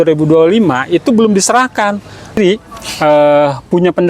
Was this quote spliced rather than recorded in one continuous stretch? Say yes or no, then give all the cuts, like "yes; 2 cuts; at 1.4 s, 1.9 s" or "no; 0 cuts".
yes; 1 cut; at 2.4 s